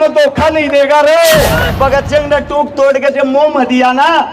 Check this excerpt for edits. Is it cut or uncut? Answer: cut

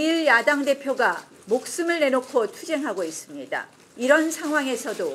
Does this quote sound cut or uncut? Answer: cut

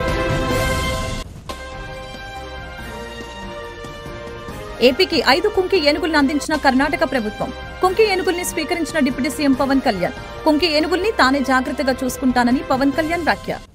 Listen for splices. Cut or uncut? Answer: uncut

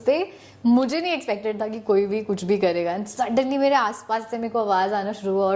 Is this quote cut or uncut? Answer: uncut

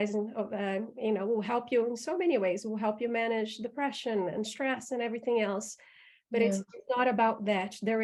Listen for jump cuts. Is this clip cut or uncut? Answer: uncut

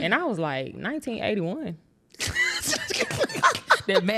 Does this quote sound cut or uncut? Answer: uncut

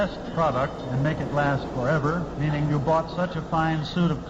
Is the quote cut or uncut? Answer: uncut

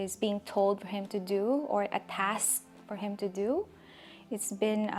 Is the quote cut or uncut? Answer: uncut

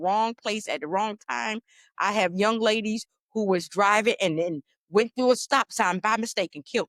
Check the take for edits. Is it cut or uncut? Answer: uncut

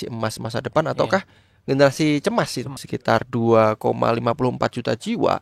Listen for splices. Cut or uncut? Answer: cut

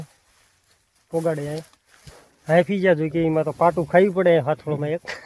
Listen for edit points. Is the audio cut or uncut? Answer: uncut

